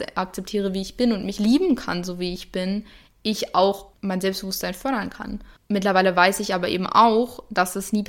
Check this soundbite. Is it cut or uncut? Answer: cut